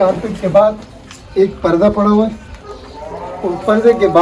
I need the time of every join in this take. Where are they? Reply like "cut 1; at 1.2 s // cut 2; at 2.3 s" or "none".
none